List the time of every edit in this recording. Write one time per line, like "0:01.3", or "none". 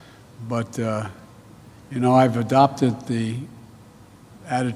0:01.4